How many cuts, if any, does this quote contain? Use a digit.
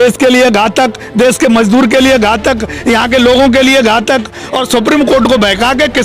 1